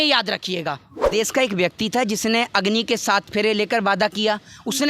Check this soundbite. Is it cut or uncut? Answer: cut